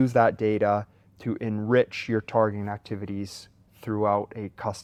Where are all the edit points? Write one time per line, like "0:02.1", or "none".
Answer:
none